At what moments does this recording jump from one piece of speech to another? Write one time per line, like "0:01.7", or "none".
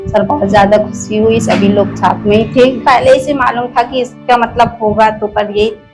0:02.8